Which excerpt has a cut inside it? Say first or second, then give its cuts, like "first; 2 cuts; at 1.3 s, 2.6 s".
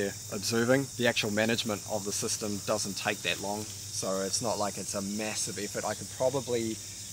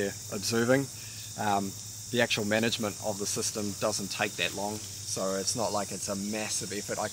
first; 1 cut; at 0.9 s